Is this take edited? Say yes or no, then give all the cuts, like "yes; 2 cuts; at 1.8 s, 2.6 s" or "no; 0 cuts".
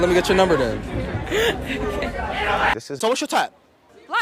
yes; 1 cut; at 3.0 s